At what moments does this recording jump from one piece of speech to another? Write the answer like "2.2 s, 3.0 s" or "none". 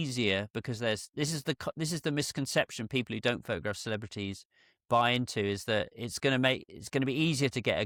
none